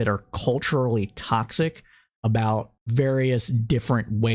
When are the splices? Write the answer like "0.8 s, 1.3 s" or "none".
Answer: 2.8 s